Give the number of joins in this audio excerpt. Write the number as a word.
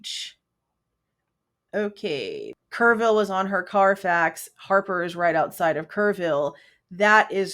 one